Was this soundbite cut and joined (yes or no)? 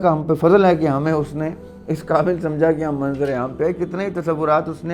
no